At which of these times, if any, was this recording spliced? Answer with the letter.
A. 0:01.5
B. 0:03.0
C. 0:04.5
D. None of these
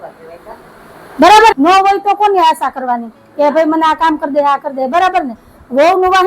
A